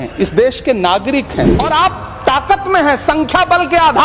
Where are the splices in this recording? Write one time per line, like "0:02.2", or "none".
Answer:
0:01.5